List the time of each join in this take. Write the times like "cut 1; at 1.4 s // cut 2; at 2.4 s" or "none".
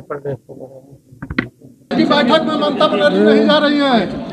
cut 1; at 1.9 s